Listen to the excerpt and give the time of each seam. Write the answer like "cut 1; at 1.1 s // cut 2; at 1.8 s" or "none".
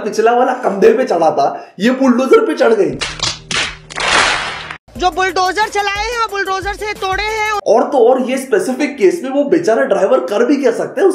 cut 1; at 4.9 s